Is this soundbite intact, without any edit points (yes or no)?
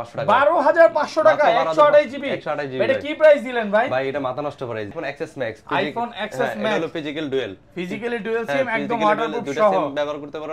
no